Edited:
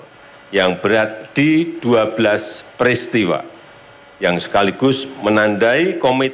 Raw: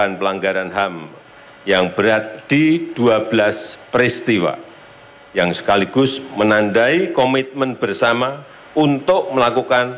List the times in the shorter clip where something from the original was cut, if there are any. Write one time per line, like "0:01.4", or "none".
none